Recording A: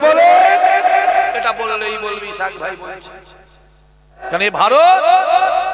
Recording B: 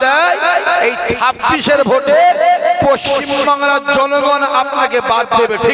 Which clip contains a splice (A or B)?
A